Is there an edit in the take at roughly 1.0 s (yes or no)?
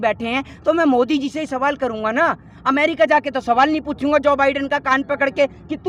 no